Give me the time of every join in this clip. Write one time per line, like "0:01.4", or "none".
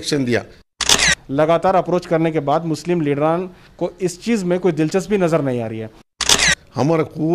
0:01.0
0:06.2